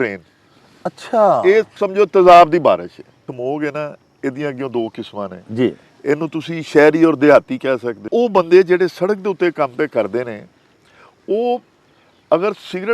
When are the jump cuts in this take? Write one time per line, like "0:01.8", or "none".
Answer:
0:03.2
0:08.1